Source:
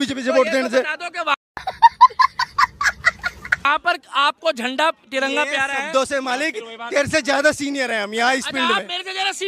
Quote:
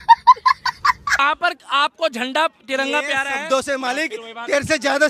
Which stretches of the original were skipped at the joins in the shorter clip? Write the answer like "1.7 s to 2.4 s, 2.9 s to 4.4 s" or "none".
2.8 s to 3.5 s